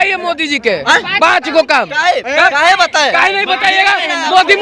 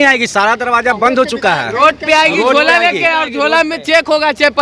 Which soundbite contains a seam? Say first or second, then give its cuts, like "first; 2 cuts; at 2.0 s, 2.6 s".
first; 1 cut; at 2.2 s